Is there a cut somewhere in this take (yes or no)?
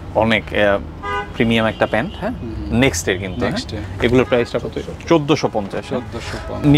no